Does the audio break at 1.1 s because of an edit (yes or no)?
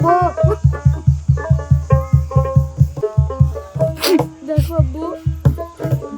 no